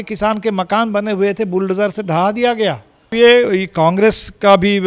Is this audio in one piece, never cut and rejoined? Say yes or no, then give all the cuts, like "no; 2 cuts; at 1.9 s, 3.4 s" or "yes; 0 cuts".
no; 1 cut; at 3.1 s